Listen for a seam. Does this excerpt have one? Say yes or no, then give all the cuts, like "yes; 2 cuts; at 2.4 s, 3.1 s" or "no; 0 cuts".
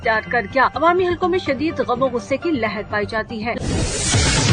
yes; 1 cut; at 3.6 s